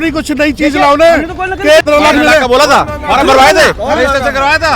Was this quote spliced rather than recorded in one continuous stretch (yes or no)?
yes